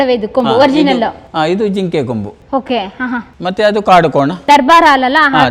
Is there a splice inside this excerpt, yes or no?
yes